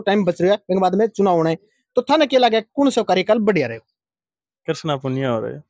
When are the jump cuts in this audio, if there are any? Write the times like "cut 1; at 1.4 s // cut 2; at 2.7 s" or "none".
none